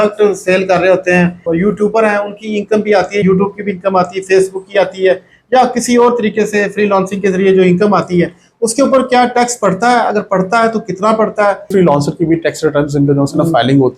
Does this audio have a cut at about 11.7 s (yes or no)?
yes